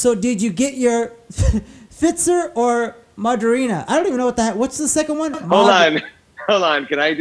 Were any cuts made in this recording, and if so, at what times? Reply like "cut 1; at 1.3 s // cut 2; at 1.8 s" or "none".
none